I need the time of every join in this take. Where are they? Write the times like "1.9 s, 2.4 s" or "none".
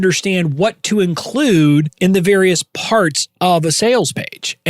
1.9 s